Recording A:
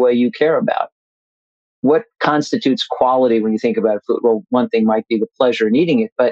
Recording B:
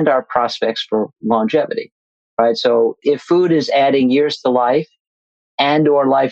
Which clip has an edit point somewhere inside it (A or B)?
B